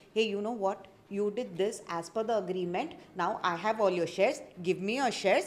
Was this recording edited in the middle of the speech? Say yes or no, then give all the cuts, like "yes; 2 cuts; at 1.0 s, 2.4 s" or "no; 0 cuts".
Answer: no; 0 cuts